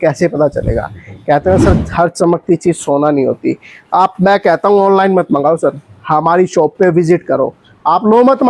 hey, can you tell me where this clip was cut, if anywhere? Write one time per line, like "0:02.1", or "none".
none